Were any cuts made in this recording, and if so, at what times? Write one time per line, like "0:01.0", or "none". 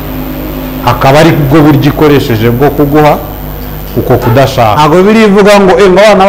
0:04.7